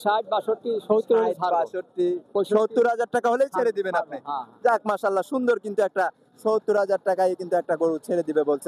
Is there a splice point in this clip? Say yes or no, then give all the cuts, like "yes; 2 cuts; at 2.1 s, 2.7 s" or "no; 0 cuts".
no; 0 cuts